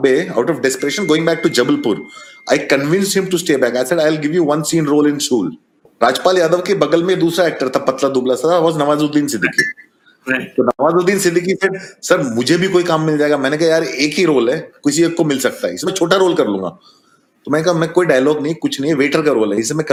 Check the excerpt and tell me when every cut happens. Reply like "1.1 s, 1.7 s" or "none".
none